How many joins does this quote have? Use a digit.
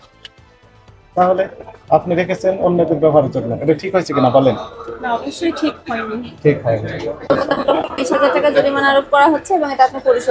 1